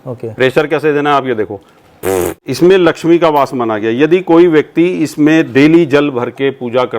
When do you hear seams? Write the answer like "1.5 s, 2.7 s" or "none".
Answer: 2.4 s